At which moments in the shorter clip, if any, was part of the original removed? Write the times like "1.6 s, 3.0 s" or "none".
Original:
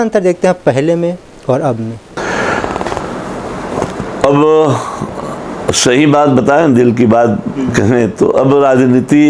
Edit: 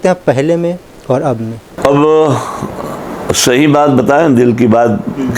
1.7 s